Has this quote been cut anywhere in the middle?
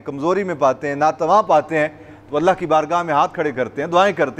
no; 0 cuts

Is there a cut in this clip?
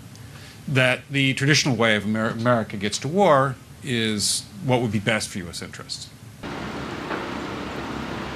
no; 0 cuts

